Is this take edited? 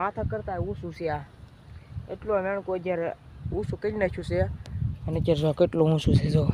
no; 0 cuts

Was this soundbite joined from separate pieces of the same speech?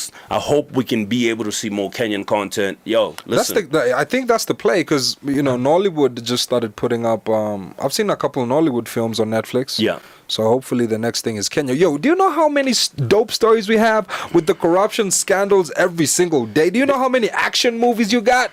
no; 0 cuts

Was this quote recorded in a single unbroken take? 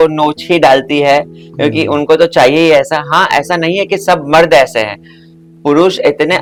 yes; 0 cuts

